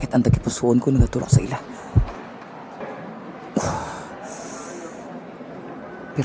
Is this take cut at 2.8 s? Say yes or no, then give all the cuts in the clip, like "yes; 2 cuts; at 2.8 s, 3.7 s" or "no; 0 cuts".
yes; 1 cut; at 2.8 s